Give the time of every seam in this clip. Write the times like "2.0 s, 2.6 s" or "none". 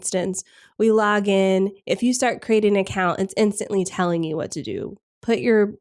none

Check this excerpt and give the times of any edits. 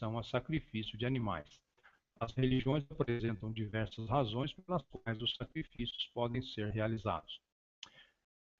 6.0 s

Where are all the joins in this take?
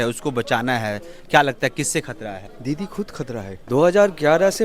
2.5 s, 3.5 s

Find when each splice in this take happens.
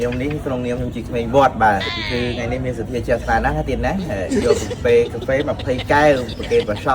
2.0 s

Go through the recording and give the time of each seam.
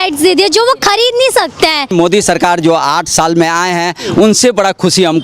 1.9 s

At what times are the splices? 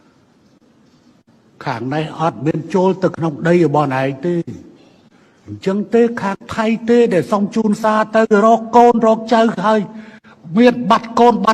none

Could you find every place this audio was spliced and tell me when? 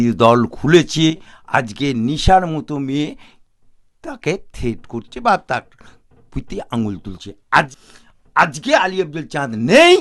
1.3 s, 7.8 s

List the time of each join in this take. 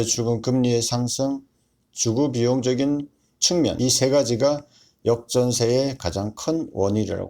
3.8 s

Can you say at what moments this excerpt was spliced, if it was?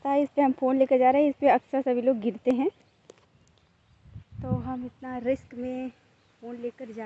none

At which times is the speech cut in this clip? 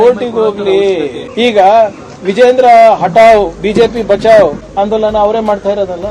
1.2 s, 4.6 s

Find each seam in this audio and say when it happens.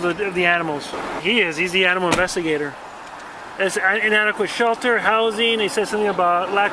1.2 s

